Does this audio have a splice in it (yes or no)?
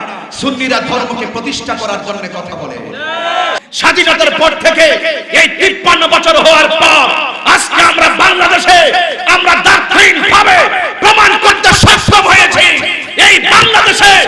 yes